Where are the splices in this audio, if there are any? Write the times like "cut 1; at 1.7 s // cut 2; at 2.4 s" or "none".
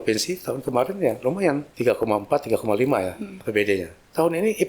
cut 1; at 1.7 s // cut 2; at 3.7 s

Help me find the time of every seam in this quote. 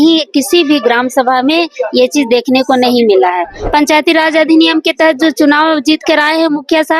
cut 1; at 3.6 s

